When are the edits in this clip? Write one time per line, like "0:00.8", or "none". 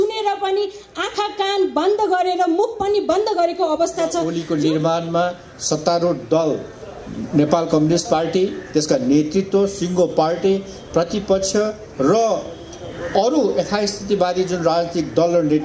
0:04.3